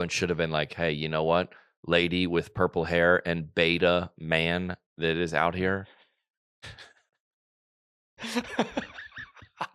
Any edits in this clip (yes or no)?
no